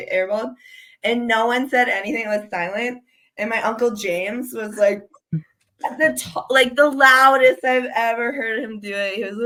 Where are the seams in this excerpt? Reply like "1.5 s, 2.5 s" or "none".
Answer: none